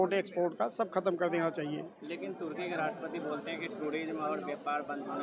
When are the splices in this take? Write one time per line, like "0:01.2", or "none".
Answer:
none